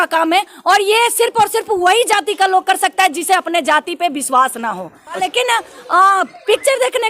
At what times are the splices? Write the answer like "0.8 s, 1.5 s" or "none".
5.2 s